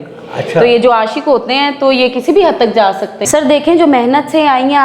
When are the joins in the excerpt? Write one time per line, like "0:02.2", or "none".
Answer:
0:03.2